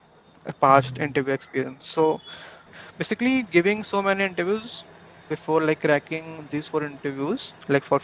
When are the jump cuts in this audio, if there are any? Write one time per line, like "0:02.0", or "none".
0:02.8